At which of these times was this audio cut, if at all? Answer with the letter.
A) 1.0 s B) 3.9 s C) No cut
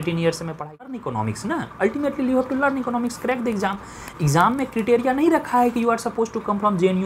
A